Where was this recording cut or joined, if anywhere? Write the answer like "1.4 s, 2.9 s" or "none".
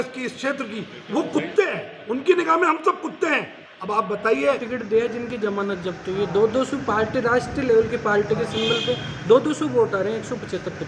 4.7 s